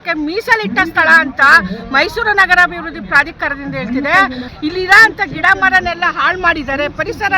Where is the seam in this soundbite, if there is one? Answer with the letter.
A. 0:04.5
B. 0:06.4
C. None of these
A